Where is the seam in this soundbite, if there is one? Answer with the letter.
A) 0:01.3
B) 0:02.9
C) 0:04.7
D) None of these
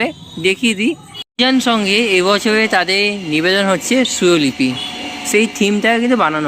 A